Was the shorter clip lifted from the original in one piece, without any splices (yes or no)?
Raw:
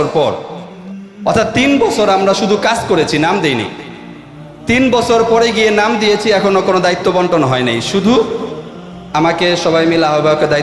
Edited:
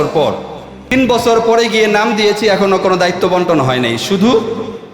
no